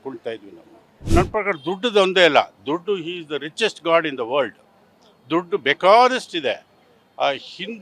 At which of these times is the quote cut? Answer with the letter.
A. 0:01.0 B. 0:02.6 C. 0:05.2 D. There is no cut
A